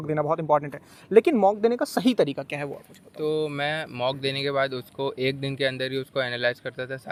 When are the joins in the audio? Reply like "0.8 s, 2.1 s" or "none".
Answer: none